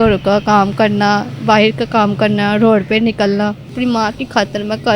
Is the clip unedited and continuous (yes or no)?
no